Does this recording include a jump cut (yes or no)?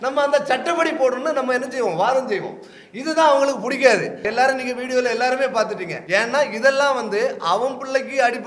yes